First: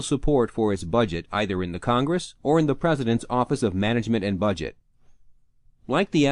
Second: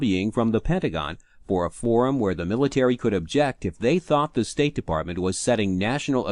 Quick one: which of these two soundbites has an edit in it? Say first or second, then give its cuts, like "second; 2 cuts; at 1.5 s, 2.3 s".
second; 1 cut; at 5.4 s